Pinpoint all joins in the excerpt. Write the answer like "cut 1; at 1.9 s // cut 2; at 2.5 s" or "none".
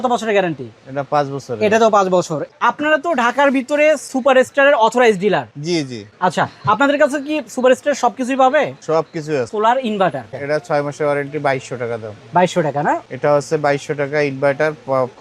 cut 1; at 2.5 s // cut 2; at 9.5 s // cut 3; at 10.4 s // cut 4; at 13.0 s